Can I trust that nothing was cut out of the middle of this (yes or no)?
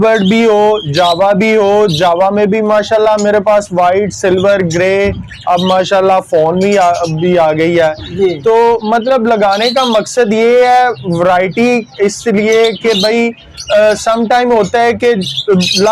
yes